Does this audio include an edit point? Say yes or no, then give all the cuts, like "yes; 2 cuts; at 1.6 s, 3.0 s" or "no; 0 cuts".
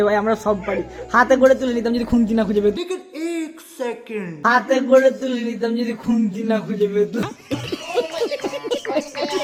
no; 0 cuts